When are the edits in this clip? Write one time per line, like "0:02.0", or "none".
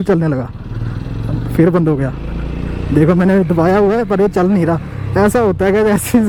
none